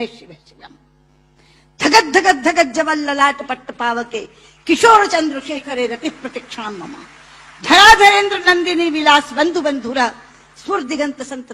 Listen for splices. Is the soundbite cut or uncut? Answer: uncut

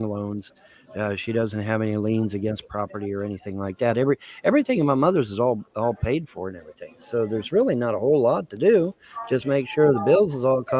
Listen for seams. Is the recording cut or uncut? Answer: uncut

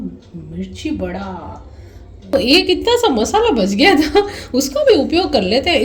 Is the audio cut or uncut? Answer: cut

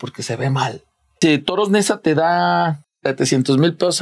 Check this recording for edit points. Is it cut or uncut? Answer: cut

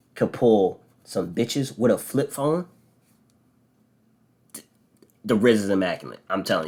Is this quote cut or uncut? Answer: uncut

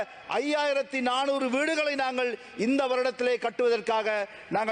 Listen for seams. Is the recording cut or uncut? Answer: uncut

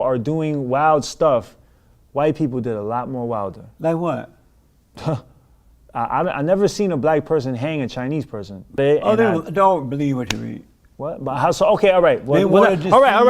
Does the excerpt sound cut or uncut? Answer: cut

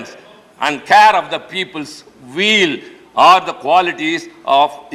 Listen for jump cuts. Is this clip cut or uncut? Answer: uncut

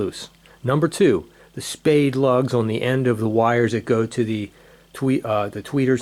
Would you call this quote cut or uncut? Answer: uncut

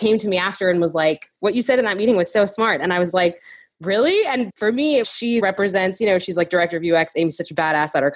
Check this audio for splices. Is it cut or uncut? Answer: uncut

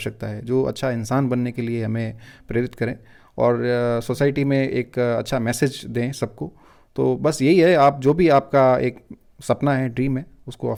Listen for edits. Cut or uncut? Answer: uncut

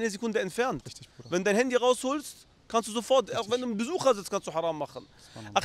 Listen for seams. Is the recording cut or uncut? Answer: uncut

